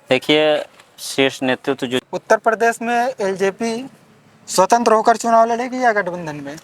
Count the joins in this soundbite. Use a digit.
1